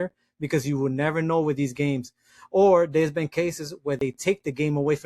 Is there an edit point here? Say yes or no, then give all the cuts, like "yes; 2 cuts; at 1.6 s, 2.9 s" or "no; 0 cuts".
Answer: no; 0 cuts